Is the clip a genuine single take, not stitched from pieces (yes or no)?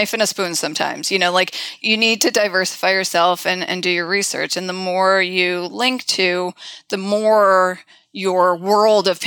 no